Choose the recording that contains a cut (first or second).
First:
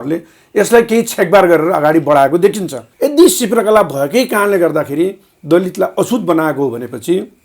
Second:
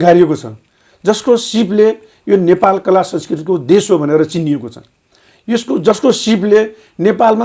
first